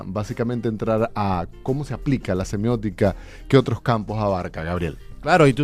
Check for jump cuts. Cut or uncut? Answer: cut